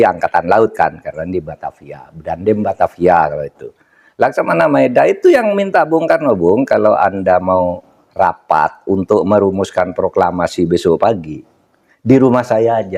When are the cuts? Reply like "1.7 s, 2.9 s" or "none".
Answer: none